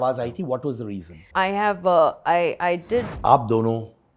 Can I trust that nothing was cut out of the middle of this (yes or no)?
no